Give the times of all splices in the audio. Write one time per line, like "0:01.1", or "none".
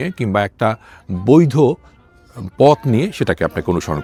none